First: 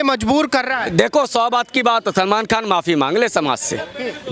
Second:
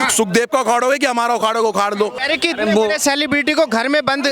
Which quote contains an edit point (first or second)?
second